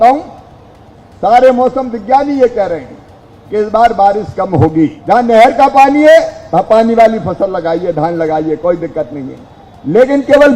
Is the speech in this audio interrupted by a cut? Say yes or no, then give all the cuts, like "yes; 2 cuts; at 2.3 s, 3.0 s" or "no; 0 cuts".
yes; 1 cut; at 5.0 s